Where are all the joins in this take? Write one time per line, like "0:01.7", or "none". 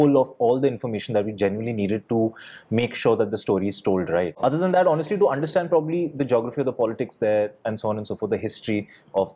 none

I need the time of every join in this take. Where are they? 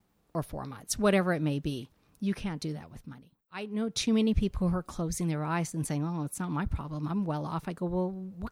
0:03.6

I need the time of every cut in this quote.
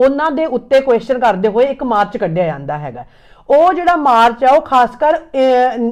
none

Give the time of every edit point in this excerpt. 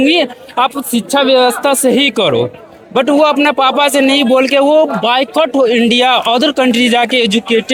none

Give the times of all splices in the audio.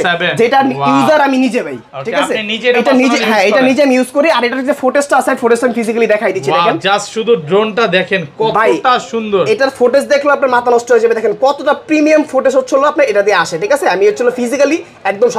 none

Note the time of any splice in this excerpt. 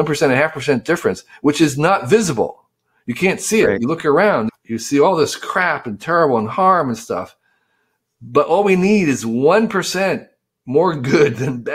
0:04.5

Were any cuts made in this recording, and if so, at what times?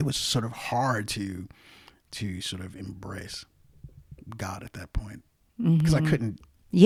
none

